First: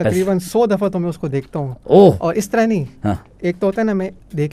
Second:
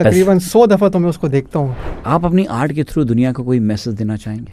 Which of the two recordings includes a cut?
second; 1 cut; at 1.7 s

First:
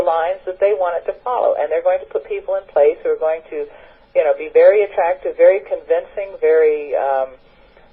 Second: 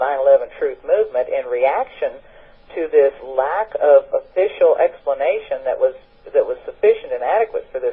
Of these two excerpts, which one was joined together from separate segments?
first; 1 cut; at 5.7 s

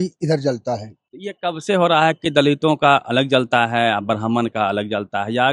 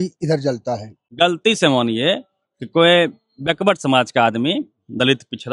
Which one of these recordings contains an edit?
second; 1 cut; at 1.0 s

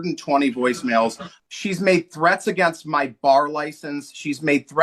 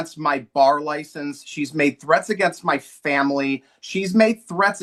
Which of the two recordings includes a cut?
first; 1 cut; at 1.3 s

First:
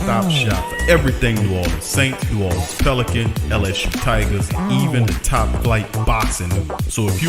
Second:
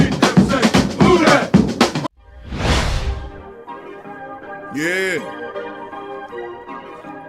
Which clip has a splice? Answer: second; 2 cuts; at 2.0 s, 3.2 s

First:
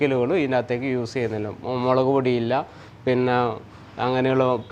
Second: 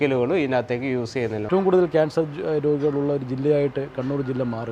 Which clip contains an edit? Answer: second; 1 cut; at 1.5 s

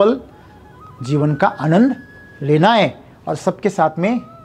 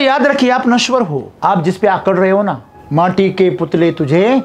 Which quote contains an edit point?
second; 2 cuts; at 1.2 s, 2.7 s

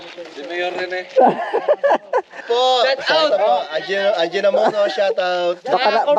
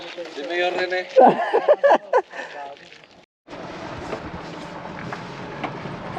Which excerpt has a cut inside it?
first; 1 cut; at 2.4 s

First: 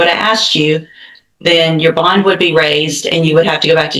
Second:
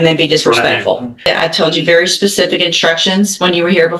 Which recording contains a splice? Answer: second; 1 cut; at 1.3 s

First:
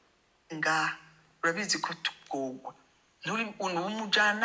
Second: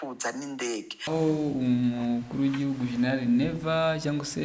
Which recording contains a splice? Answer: second; 1 cut; at 1.0 s

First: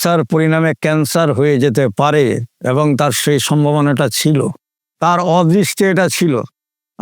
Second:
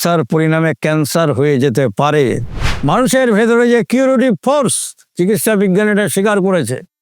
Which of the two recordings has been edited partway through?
second; 1 cut; at 2.5 s

